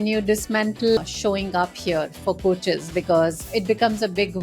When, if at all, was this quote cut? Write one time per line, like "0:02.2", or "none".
0:01.0